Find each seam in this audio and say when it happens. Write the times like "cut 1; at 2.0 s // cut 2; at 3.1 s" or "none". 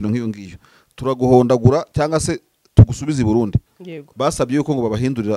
none